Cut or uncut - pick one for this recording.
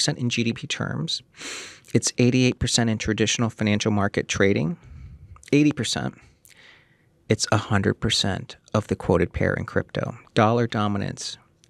uncut